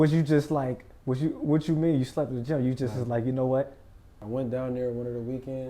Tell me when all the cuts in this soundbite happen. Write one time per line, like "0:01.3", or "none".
0:04.1